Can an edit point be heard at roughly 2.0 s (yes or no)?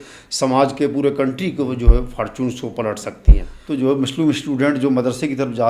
no